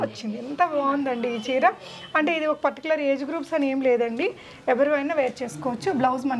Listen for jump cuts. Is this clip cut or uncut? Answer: uncut